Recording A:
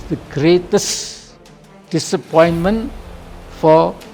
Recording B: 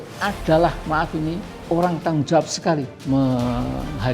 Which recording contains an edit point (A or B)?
B